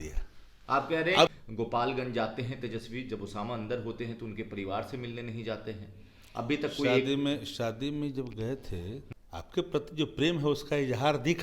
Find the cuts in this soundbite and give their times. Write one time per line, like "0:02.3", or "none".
0:01.3
0:09.0